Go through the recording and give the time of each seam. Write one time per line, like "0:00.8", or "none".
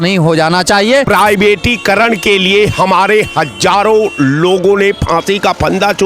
0:01.1